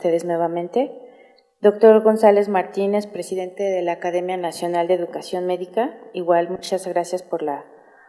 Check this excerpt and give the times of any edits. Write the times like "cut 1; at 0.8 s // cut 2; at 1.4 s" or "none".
none